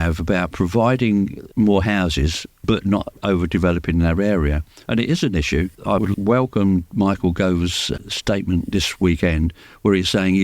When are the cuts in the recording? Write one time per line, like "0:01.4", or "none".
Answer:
0:01.4
0:02.5
0:03.2
0:05.8
0:07.9